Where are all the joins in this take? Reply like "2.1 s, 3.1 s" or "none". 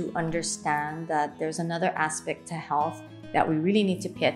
none